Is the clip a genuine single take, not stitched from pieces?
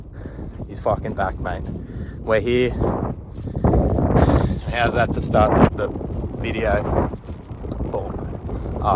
no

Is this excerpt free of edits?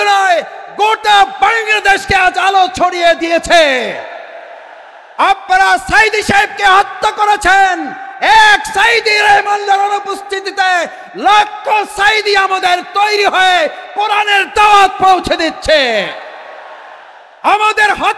yes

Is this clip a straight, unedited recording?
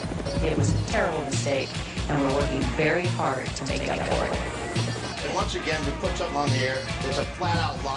yes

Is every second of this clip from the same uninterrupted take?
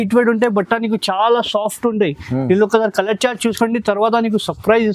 yes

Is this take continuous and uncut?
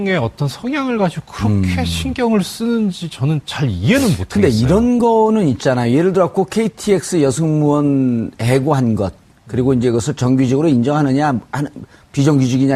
yes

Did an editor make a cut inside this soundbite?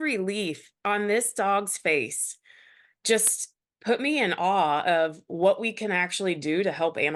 no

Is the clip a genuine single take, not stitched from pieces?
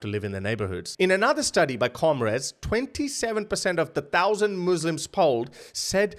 no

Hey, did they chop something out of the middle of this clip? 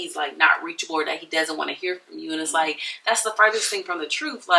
no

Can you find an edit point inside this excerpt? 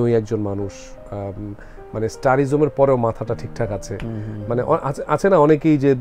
no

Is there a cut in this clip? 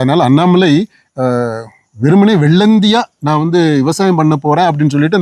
no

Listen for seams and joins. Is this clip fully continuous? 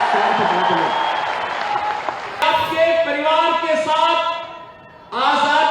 no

